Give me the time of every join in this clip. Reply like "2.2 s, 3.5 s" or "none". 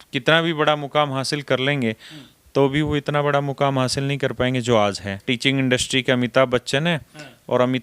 5.2 s